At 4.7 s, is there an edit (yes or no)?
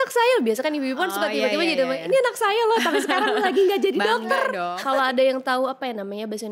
yes